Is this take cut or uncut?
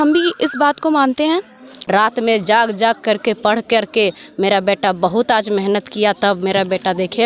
cut